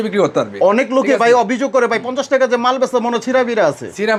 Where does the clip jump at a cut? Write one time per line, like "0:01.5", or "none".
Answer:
none